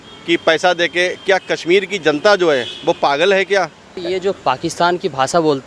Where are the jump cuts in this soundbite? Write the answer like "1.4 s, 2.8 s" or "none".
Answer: 3.9 s